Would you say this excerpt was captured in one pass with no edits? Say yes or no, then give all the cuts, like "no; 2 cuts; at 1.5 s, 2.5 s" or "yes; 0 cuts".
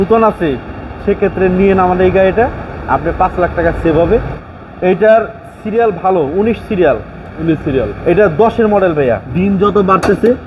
no; 2 cuts; at 4.3 s, 9.3 s